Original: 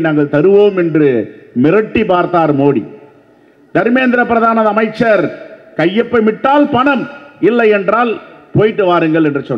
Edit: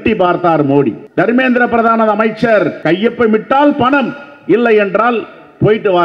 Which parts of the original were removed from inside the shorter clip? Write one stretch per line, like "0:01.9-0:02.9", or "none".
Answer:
0:02.9-0:03.6
0:05.3-0:05.7